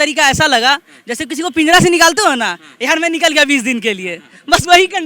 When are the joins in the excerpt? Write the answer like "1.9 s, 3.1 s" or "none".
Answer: none